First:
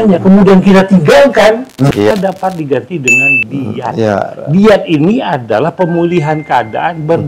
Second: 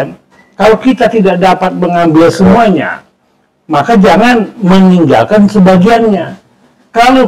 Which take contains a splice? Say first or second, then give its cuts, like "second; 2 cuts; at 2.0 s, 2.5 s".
first; 1 cut; at 1.9 s